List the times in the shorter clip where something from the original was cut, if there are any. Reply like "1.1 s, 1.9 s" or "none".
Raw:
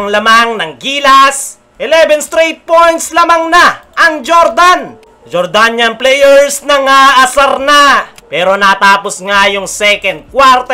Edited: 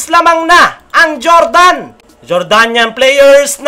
none